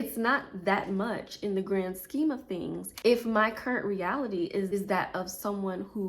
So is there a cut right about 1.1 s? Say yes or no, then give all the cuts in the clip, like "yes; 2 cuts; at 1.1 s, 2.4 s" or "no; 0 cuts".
no; 2 cuts; at 2.8 s, 4.7 s